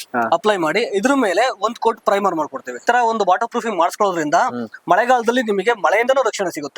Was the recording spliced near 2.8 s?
yes; 1 cut; at 2.8 s

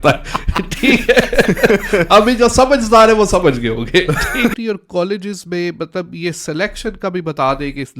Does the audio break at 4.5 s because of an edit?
yes; 1 cut; at 4.5 s

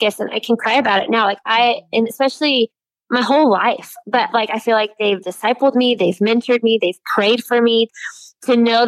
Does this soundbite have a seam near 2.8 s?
no; 1 cut; at 7.9 s

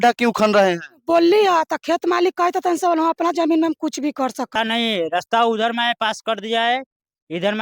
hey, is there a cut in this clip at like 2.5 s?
no; 1 cut; at 4.5 s

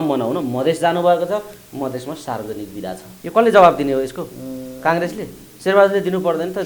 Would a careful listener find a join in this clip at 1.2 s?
no; 2 cuts; at 3.1 s, 5.4 s

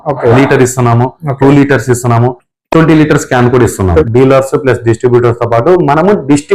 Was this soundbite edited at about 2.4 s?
no; 1 cut; at 4.0 s

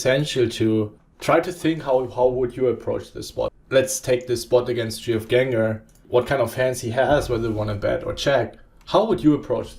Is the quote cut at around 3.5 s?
yes; 3 cuts; at 1.0 s, 3.5 s, 6.0 s

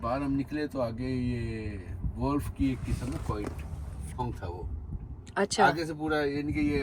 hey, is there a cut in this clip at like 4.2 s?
yes; 1 cut; at 4.2 s

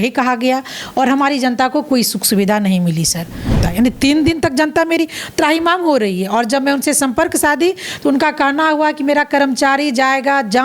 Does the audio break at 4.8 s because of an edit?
no; 1 cut; at 3.5 s

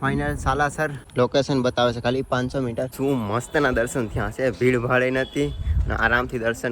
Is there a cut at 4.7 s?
no; 2 cuts; at 1.1 s, 2.9 s

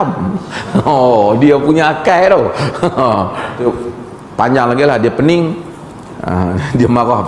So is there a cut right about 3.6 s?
yes; 1 cut; at 3.6 s

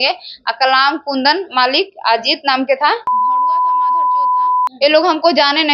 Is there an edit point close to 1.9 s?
no; 1 cut; at 4.7 s

